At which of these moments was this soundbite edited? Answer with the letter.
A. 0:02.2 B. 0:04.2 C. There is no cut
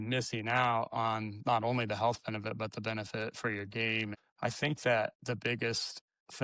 B